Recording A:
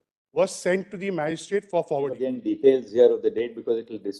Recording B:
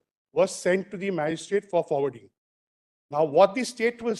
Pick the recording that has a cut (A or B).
A